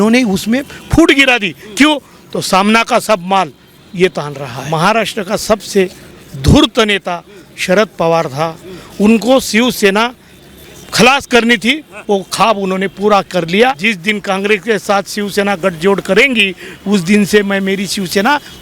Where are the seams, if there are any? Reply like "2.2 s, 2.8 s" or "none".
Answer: 4.6 s, 13.8 s